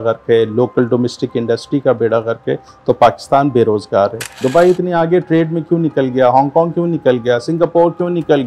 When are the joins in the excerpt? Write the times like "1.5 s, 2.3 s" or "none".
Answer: 4.4 s